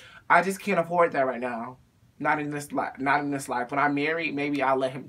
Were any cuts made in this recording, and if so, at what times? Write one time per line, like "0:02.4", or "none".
none